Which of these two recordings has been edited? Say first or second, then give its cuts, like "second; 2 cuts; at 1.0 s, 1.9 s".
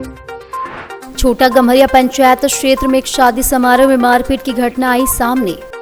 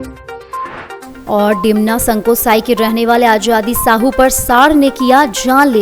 second; 1 cut; at 1.0 s